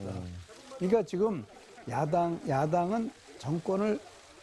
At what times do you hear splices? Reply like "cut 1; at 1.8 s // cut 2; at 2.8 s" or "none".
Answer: cut 1; at 2.3 s